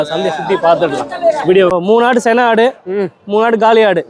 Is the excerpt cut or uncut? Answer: cut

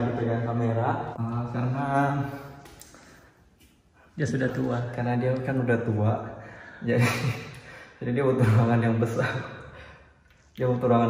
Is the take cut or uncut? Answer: cut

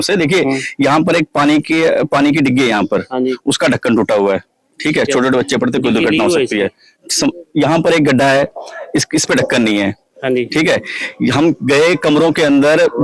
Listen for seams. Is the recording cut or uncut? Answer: uncut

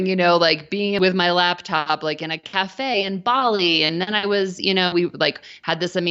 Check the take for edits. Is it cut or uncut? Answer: cut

